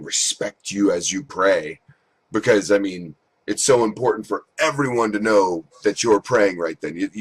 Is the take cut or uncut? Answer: cut